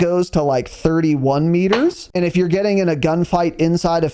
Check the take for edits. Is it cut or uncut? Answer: cut